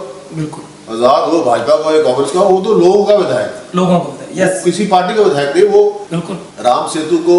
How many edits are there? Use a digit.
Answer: 1